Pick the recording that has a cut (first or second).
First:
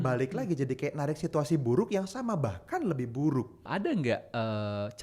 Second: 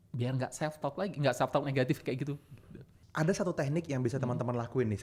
first